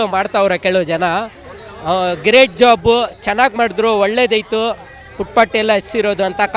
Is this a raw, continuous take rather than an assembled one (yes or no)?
yes